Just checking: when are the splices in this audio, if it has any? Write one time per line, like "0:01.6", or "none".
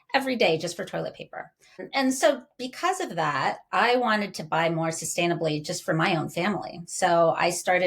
0:01.8